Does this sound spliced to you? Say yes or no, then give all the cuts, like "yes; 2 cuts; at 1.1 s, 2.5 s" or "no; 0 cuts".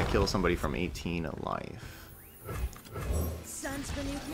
no; 0 cuts